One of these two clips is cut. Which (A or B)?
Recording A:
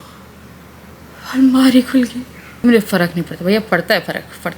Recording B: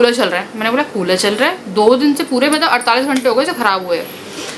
A